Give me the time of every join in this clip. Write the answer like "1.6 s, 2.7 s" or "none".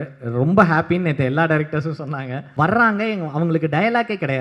2.4 s